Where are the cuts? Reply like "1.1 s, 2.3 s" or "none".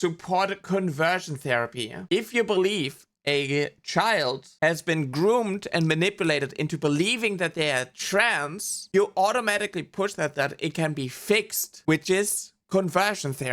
2.0 s, 4.5 s, 11.8 s